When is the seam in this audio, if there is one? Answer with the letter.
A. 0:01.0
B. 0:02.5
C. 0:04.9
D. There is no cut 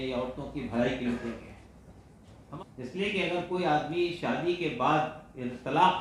B